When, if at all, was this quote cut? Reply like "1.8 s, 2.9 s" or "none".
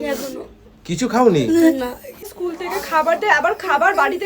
2.2 s